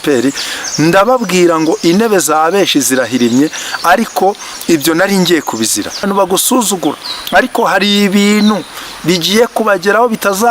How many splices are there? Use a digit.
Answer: 1